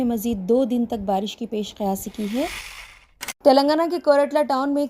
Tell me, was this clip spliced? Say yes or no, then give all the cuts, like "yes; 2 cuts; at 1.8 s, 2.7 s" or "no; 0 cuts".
yes; 1 cut; at 2.9 s